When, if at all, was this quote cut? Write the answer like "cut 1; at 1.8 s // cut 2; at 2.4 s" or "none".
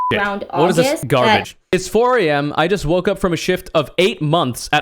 cut 1; at 1.0 s

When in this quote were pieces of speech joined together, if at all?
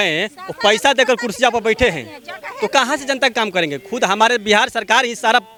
none

